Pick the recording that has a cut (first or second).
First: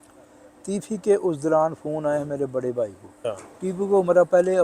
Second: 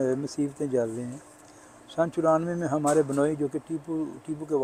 first